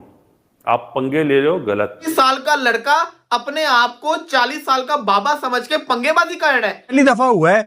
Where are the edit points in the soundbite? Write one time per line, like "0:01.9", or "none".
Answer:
0:02.1
0:06.9